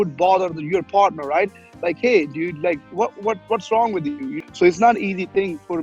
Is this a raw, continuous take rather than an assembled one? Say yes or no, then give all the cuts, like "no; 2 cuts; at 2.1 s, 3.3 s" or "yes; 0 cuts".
no; 1 cut; at 4.3 s